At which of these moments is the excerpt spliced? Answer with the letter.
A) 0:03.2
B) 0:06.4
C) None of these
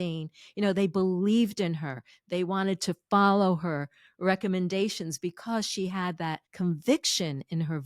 B